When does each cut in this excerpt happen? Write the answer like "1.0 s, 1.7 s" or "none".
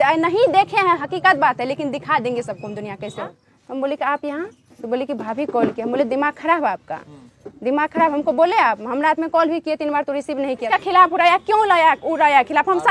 3.4 s, 10.6 s